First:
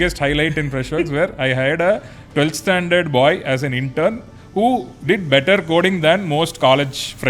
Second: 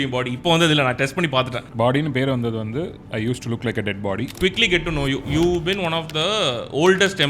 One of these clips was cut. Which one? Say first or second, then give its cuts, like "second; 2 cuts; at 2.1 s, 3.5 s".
second; 2 cuts; at 1.6 s, 4.4 s